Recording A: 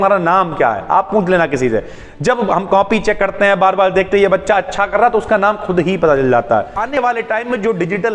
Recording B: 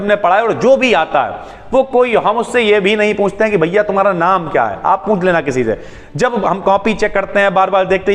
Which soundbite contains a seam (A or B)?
A